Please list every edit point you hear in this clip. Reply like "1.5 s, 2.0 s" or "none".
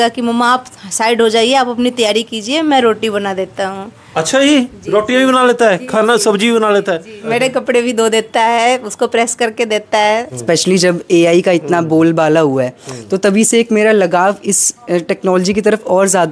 7.2 s, 10.3 s